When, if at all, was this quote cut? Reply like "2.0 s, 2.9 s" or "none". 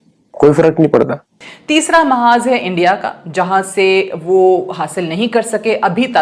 1.6 s